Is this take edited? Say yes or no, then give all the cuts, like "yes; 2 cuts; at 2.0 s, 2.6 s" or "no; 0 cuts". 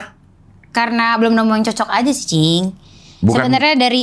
no; 0 cuts